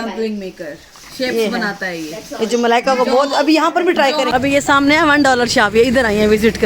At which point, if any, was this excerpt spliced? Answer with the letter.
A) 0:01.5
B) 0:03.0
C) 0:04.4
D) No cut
C